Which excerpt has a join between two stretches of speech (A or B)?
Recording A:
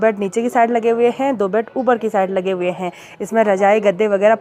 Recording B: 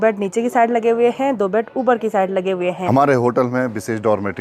B